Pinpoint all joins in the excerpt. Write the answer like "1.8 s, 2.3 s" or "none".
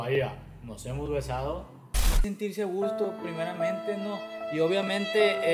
2.2 s